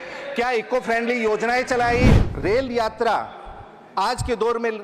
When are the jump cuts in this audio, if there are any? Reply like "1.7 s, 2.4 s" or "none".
2.2 s